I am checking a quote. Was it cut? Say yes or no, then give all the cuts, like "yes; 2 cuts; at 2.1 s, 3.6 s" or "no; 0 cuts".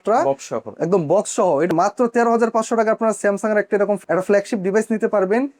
yes; 1 cut; at 1.7 s